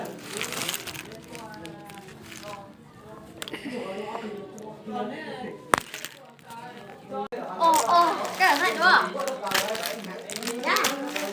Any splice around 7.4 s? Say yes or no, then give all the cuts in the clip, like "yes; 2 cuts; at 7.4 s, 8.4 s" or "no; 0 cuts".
yes; 1 cut; at 7.4 s